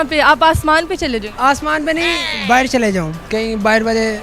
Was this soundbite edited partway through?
no; 0 cuts

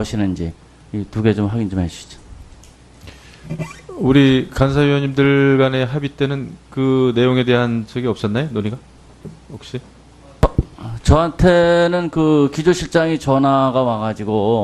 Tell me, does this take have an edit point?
no; 0 cuts

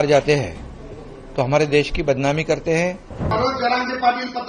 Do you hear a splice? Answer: yes; 1 cut; at 3.3 s

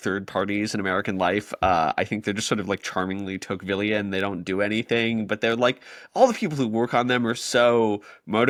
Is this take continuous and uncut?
yes; 0 cuts

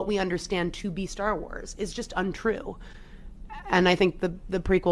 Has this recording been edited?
yes; 1 cut; at 3.1 s

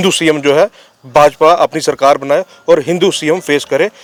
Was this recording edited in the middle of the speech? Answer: no; 0 cuts

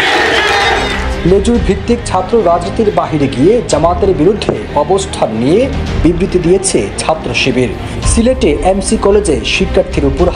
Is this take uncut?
yes; 0 cuts

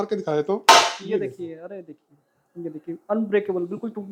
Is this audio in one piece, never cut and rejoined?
yes; 0 cuts

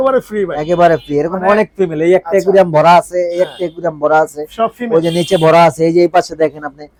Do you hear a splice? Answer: no; 0 cuts

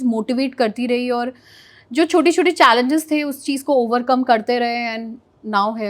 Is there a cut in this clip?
no; 0 cuts

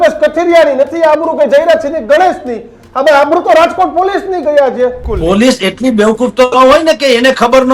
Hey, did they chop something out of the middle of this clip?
yes; 1 cut; at 5.1 s

